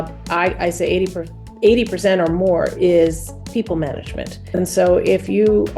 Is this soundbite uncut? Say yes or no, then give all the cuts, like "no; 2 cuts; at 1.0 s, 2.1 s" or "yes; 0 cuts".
no; 1 cut; at 4.4 s